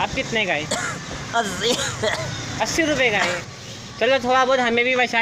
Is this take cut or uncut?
cut